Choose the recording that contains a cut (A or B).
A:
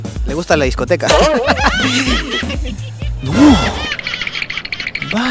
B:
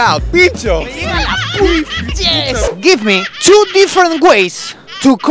B